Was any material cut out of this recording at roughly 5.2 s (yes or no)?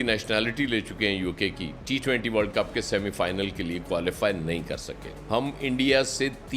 yes